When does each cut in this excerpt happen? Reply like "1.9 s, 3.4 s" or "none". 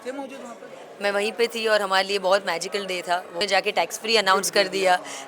3.4 s